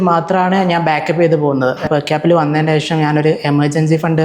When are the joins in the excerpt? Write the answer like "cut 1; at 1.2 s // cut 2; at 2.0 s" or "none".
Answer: cut 1; at 1.9 s